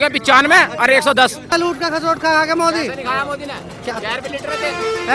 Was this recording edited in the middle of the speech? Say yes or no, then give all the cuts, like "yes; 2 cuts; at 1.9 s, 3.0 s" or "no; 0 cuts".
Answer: yes; 1 cut; at 1.6 s